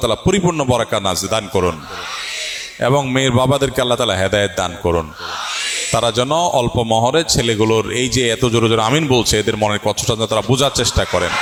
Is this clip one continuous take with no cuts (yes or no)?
yes